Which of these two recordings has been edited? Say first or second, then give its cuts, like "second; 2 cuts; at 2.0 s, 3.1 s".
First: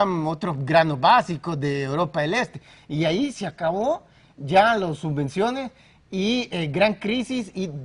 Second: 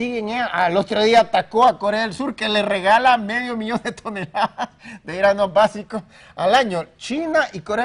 second; 1 cut; at 4.5 s